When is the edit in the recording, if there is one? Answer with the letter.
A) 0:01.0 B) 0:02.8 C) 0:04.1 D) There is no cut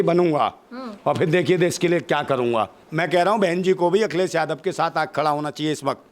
B